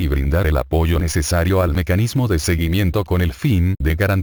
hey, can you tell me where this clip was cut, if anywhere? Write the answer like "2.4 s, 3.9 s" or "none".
none